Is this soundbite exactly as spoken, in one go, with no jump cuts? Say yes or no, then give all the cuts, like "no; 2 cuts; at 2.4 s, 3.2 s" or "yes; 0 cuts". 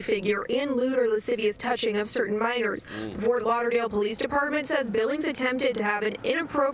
no; 2 cuts; at 2.7 s, 4.9 s